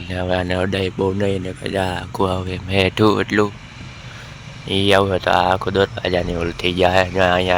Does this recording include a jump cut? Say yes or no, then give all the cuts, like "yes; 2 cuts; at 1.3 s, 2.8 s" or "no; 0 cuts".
no; 0 cuts